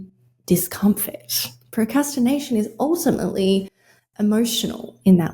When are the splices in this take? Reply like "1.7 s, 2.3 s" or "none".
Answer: none